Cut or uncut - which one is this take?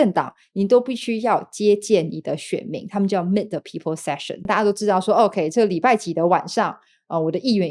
cut